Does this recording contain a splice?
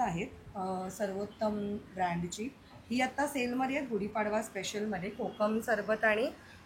no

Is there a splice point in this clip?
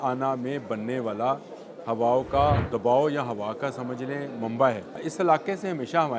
yes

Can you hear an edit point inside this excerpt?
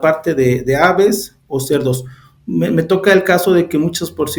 no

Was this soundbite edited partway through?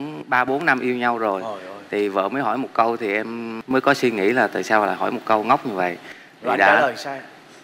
no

